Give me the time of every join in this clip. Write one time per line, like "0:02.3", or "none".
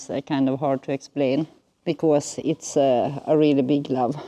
0:01.6